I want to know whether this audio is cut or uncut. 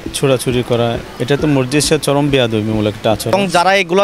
cut